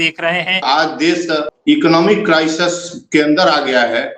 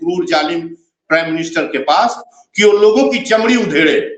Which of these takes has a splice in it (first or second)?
first